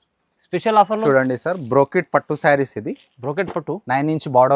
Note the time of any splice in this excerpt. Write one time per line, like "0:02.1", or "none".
0:01.0